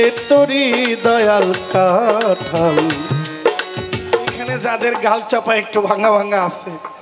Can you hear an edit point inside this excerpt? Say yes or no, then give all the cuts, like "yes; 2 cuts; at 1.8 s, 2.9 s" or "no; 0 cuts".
yes; 1 cut; at 4.5 s